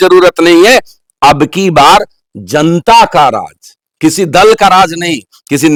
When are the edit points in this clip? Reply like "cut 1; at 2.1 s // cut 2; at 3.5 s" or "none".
none